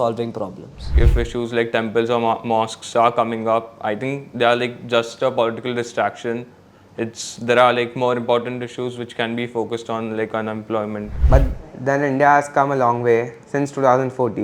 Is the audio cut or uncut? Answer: cut